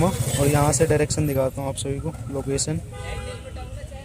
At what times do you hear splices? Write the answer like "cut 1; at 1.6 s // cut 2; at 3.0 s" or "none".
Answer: none